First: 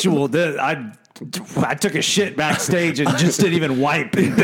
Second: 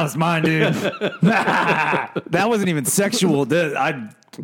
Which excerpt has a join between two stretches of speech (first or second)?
second